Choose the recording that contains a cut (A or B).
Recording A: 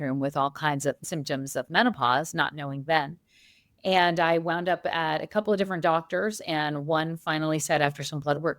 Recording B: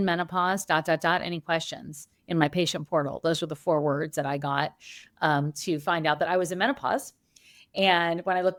A